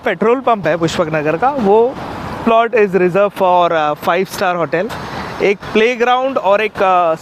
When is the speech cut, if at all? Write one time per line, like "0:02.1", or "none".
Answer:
0:02.4
0:04.9